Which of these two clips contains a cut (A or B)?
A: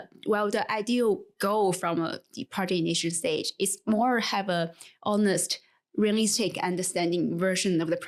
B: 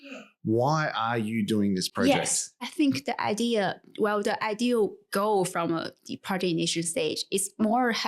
B